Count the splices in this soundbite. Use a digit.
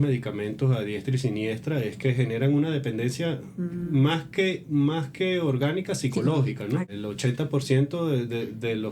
1